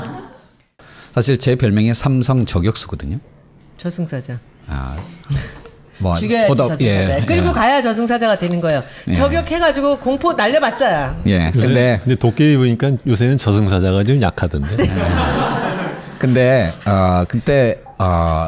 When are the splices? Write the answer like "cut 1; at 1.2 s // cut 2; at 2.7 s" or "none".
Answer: cut 1; at 12.0 s